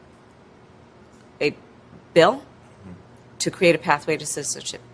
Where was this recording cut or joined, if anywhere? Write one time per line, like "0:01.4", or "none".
none